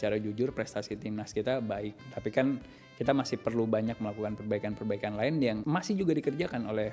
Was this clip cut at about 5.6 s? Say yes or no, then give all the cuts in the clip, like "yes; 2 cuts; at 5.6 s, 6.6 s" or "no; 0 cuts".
yes; 1 cut; at 5.6 s